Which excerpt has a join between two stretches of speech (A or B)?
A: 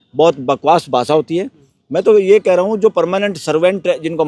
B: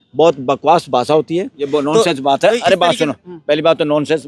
B